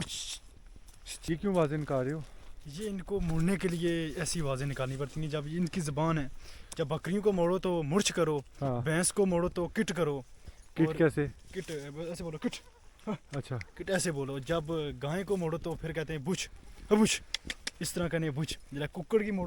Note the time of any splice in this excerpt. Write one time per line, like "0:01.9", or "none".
0:01.3